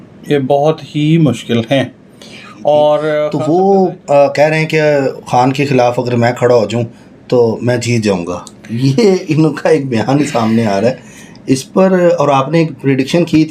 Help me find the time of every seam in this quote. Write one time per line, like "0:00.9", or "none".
0:03.4